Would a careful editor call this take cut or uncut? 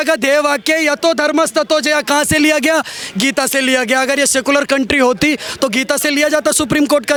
uncut